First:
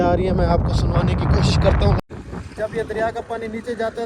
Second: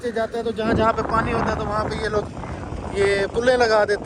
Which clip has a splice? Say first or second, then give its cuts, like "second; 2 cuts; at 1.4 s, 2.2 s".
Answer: first; 1 cut; at 2.0 s